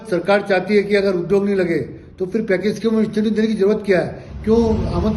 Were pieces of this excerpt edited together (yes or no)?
no